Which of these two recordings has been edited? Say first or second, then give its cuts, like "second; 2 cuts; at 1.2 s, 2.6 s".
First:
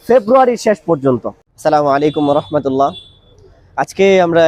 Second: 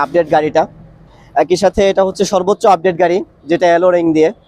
first; 1 cut; at 1.5 s